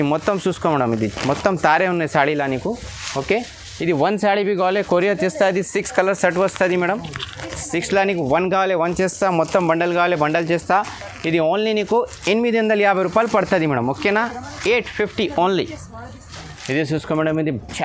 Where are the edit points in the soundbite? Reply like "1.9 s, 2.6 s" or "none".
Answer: none

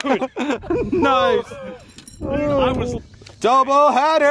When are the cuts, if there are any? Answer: 3.0 s

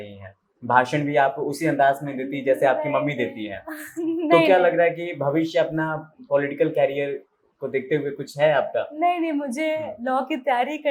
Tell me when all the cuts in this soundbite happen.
none

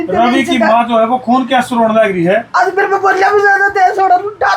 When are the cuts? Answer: none

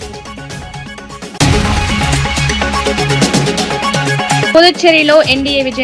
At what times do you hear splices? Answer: 1.4 s, 4.5 s

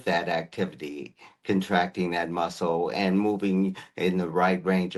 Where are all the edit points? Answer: none

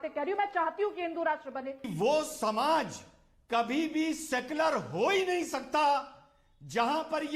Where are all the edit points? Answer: 1.9 s

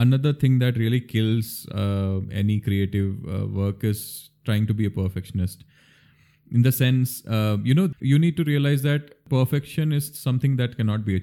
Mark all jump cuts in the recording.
7.9 s, 9.2 s

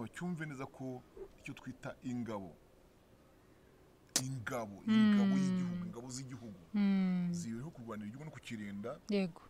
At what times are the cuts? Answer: none

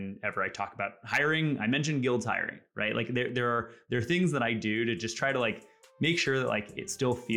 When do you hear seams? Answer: none

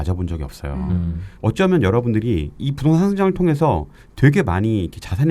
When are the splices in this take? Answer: 2.6 s

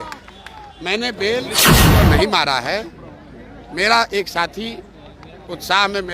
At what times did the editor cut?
1.5 s, 2.2 s

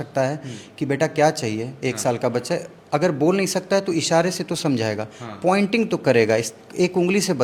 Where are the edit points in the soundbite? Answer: none

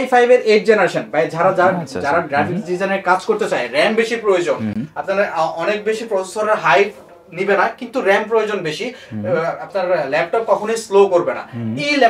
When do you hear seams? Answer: none

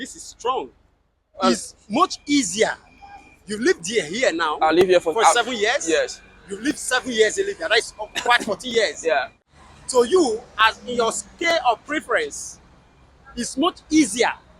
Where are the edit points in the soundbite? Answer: 9.3 s

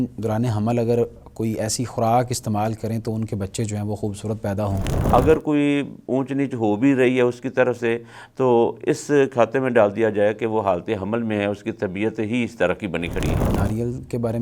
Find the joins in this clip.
4.9 s, 13.5 s

